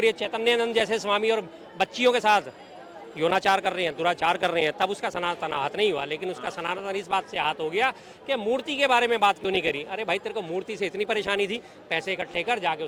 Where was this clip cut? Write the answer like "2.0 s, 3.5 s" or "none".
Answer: none